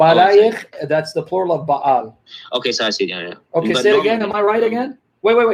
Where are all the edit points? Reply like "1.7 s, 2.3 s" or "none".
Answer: none